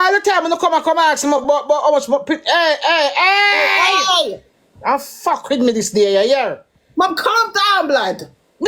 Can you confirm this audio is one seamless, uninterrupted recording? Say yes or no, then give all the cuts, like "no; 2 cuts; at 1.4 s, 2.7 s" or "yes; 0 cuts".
yes; 0 cuts